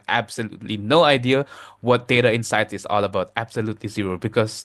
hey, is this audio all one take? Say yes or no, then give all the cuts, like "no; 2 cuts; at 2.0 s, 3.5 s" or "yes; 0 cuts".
yes; 0 cuts